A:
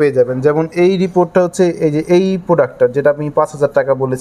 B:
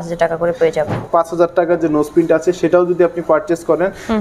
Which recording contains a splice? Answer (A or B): B